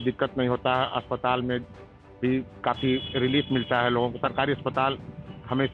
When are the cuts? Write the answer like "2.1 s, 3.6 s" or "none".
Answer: none